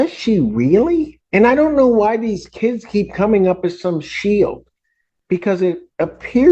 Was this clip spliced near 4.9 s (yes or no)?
no